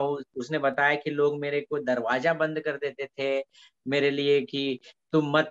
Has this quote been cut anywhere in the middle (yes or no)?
no